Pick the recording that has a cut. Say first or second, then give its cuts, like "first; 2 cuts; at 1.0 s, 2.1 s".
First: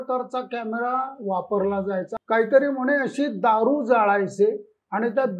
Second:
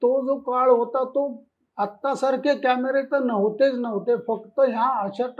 first; 1 cut; at 2.1 s